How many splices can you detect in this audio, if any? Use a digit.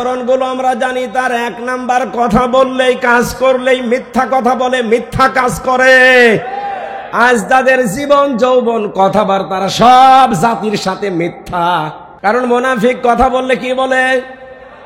1